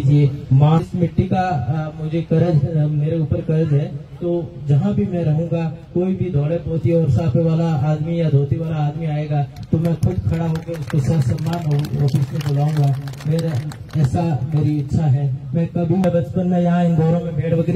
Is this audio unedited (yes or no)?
no